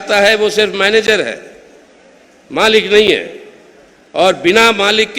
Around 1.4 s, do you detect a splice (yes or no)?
no